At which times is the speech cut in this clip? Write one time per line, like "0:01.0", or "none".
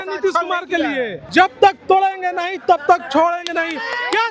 0:01.2